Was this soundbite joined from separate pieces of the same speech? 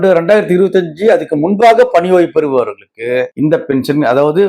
no; 0 cuts

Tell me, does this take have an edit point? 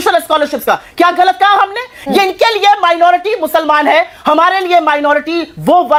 no; 0 cuts

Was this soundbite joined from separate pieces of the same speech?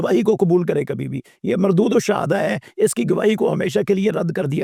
no; 0 cuts

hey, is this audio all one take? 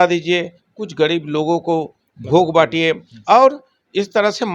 yes; 0 cuts

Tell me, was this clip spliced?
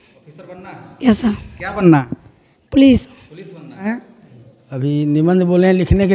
yes; 1 cut; at 3.9 s

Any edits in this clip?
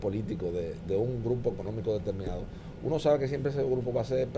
no; 0 cuts

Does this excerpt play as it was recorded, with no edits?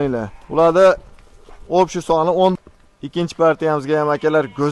no; 1 cut; at 2.5 s

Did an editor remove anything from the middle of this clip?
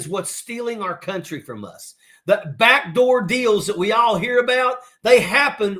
no; 0 cuts

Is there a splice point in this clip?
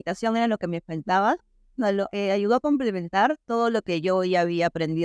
no; 0 cuts

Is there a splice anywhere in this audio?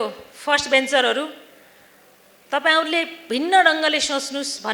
no; 0 cuts

